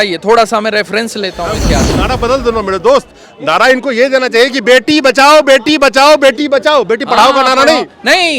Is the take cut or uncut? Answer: cut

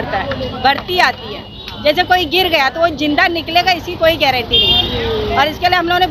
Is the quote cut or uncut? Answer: uncut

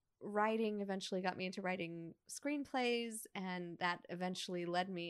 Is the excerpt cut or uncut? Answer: uncut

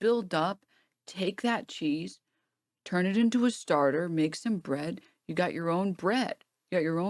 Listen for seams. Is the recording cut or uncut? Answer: uncut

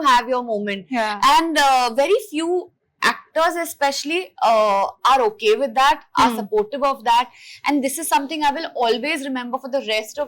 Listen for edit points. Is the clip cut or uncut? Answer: uncut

